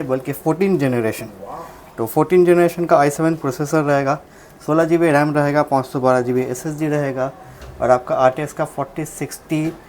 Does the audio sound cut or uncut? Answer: uncut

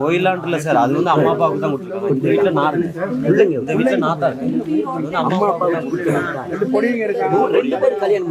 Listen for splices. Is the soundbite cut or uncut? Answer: uncut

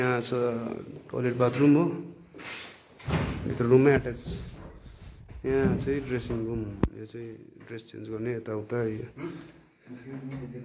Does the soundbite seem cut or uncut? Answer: uncut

